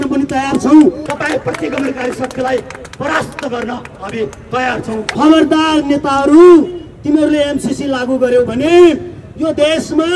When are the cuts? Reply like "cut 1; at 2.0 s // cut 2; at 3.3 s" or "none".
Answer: cut 1; at 1.1 s // cut 2; at 5.1 s

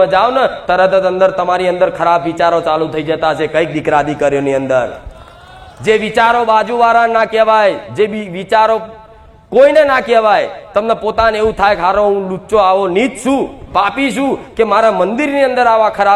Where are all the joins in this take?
none

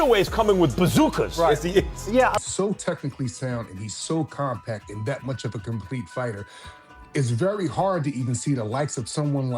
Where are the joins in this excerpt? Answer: cut 1; at 2.4 s

